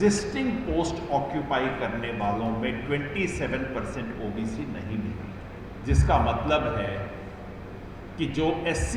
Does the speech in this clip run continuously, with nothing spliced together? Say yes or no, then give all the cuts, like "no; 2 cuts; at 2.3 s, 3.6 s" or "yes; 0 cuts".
no; 1 cut; at 5.6 s